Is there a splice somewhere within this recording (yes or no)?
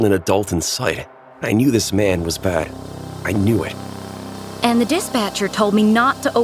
yes